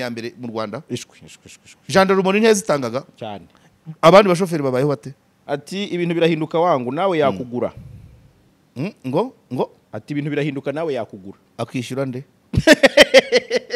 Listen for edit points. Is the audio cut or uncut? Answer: cut